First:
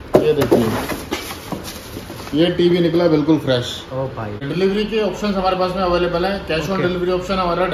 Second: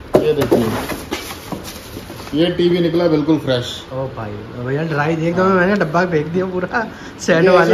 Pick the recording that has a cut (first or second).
first